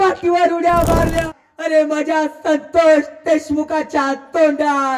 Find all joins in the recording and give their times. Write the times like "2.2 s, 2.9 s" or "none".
1.3 s